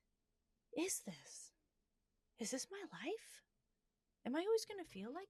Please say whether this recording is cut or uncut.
uncut